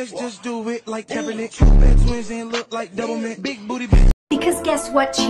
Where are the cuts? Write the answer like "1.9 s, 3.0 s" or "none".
4.2 s